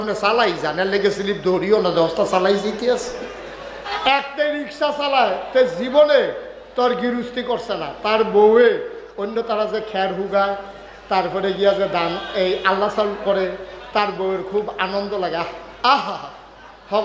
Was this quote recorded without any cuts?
no; 1 cut; at 3.8 s

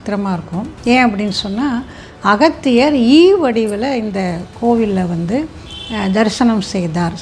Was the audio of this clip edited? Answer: no; 0 cuts

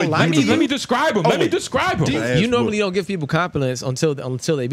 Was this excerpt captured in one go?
no; 1 cut; at 2.2 s

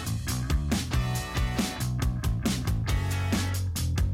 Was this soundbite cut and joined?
yes; 1 cut; at 2.1 s

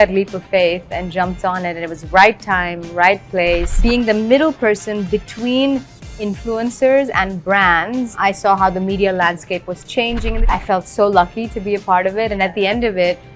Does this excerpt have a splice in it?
yes; 3 cuts; at 3.7 s, 8.1 s, 10.4 s

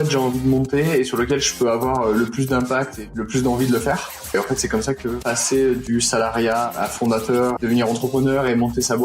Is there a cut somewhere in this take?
yes; 1 cut; at 7.6 s

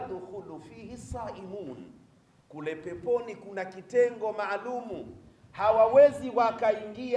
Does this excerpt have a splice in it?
no; 0 cuts

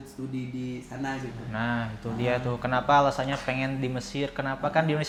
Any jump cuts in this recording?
no; 0 cuts

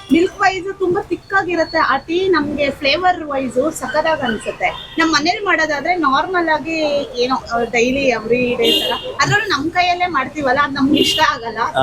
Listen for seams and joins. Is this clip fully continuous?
yes; 0 cuts

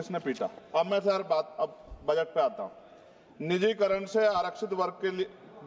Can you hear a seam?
no; 0 cuts

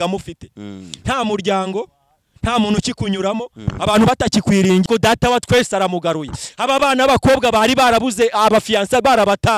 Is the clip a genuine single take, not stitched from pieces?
no; 1 cut; at 4.9 s

